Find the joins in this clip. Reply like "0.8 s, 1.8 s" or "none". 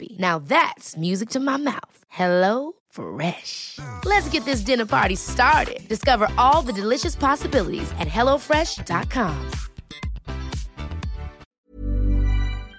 11.5 s